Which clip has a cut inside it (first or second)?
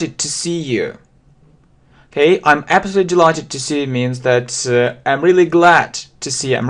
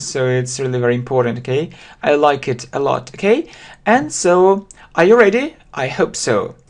second